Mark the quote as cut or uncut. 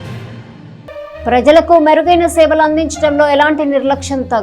uncut